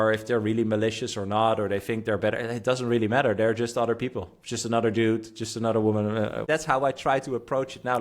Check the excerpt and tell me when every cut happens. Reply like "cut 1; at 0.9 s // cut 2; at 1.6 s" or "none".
cut 1; at 6.5 s